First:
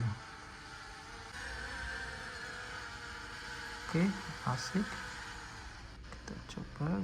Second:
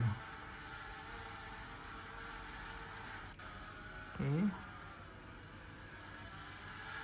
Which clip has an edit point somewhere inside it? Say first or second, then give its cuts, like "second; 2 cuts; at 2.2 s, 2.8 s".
first; 1 cut; at 1.3 s